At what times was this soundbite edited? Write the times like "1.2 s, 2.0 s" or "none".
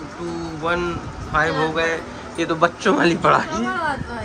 none

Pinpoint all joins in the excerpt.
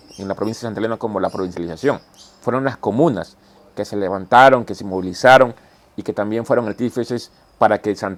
none

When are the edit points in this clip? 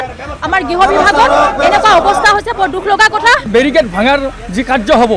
3.5 s

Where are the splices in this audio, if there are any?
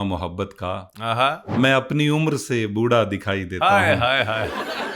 1.5 s

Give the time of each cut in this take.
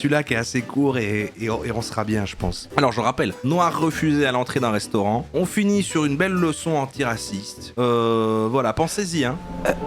2.6 s

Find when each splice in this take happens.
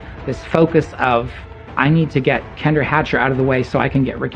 1.6 s

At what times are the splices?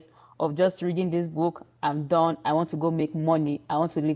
none

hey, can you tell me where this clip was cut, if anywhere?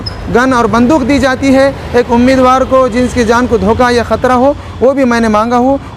none

